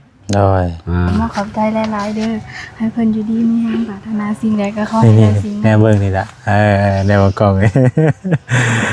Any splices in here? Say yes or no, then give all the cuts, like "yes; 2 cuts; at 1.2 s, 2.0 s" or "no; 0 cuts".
yes; 1 cut; at 1.1 s